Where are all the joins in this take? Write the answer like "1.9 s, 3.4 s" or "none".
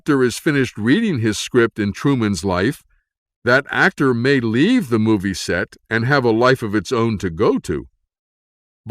3.9 s

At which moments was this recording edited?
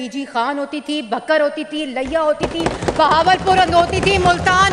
none

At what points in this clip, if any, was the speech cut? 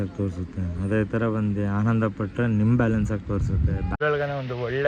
3.9 s

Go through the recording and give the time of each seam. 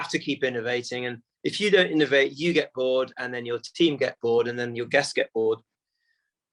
none

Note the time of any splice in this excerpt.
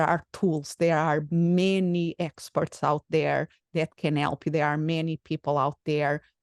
none

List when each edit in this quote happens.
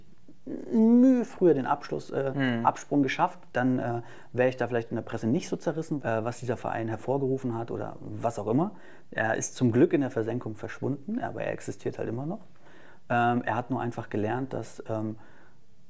6.0 s

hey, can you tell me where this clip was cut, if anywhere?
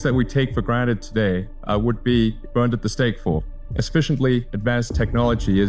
1.5 s, 2.4 s, 3.6 s, 4.5 s

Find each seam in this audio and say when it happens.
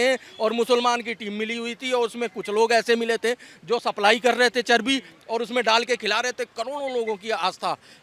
none

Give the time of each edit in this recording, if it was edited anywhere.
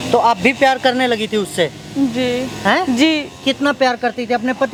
none

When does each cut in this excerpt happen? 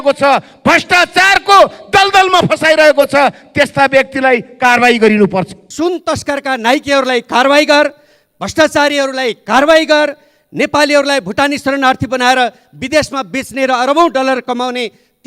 5.7 s

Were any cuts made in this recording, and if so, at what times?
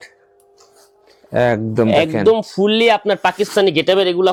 none

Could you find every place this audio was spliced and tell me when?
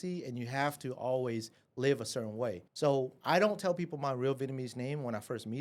2.7 s

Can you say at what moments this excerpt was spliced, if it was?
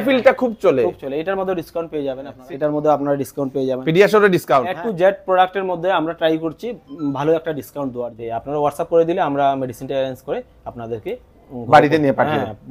2.3 s, 4.7 s, 8.1 s

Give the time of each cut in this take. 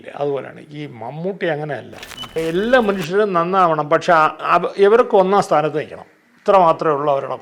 2.4 s

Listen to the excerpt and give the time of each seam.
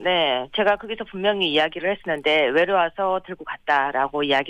1.4 s

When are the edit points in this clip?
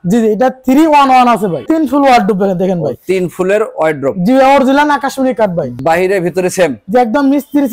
1.6 s, 5.8 s

